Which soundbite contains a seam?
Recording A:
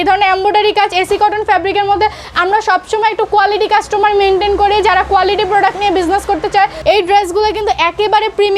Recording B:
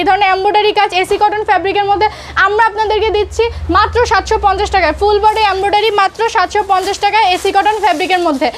A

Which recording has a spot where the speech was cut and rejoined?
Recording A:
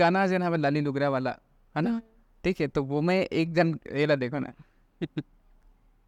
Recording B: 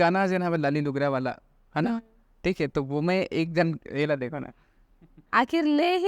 B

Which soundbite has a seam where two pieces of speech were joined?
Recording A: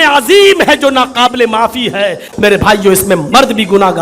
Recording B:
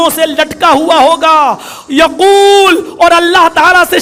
A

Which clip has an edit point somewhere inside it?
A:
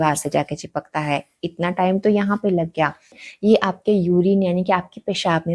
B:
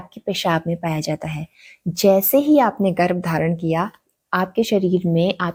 A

